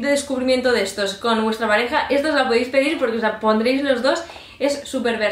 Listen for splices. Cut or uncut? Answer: uncut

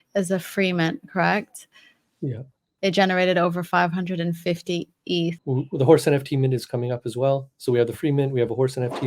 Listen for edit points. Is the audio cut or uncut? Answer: cut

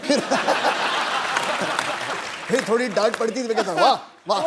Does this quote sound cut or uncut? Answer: cut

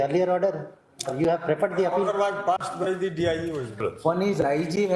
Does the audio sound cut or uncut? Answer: cut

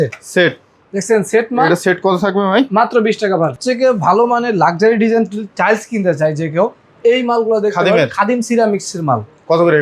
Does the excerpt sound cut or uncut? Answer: cut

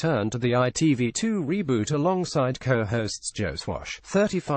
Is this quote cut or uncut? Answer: uncut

